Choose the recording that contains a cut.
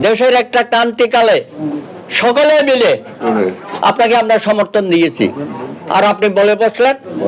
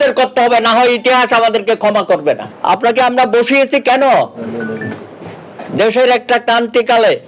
second; 1 cut; at 2.5 s

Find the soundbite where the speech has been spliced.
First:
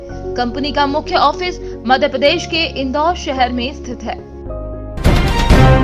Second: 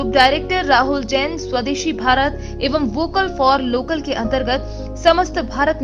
first; 1 cut; at 4.9 s

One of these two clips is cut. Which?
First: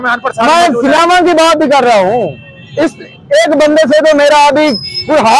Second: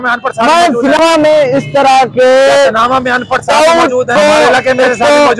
second; 2 cuts; at 1.0 s, 4.1 s

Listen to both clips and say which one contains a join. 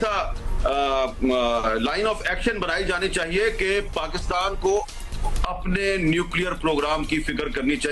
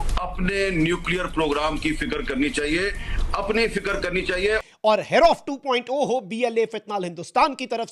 second; 1 cut; at 4.7 s

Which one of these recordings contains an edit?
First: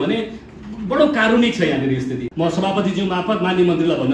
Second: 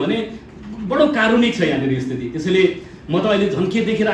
first; 1 cut; at 2.3 s

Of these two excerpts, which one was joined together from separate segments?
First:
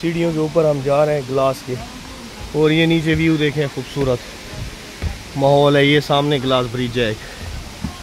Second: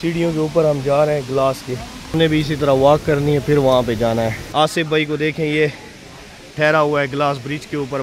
second; 2 cuts; at 2.1 s, 4.4 s

